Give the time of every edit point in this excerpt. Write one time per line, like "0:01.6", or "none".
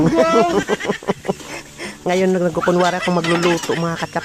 none